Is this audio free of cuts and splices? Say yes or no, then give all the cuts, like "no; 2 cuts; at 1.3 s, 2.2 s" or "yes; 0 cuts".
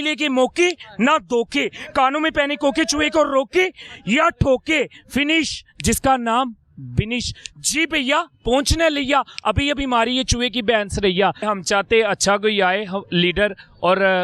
no; 1 cut; at 11.4 s